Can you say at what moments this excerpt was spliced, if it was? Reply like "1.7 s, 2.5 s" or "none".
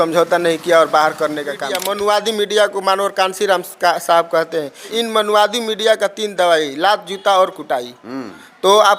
1.8 s, 4.8 s